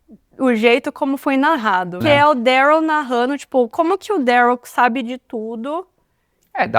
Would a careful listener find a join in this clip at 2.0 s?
yes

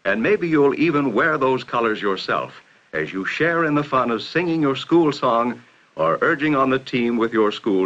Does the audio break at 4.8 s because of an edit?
no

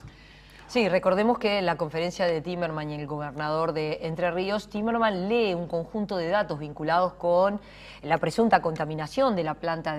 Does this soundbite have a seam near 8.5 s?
yes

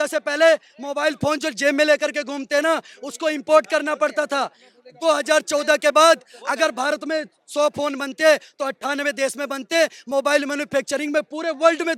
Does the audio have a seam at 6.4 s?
no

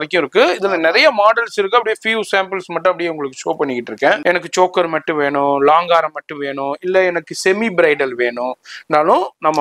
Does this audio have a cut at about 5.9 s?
no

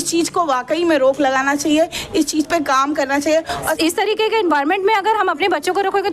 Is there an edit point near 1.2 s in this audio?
no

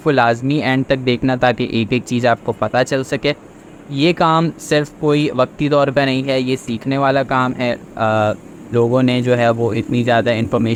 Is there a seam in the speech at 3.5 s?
no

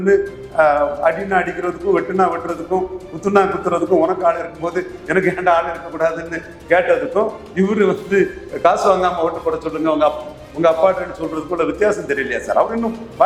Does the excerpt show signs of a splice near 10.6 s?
no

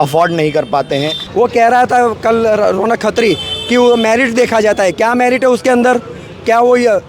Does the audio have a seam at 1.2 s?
yes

